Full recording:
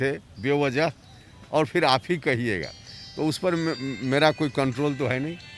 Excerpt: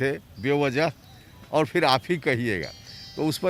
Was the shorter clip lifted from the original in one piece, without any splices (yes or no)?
yes